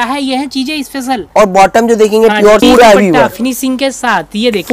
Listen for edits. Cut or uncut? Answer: cut